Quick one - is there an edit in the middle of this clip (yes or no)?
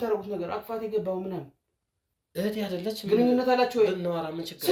no